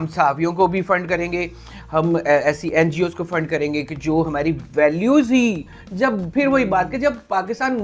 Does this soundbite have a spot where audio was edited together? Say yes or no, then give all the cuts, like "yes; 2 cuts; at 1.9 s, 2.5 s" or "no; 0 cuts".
no; 0 cuts